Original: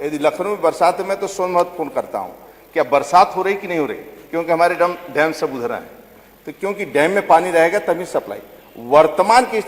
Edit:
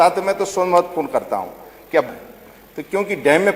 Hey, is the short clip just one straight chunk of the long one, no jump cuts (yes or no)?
no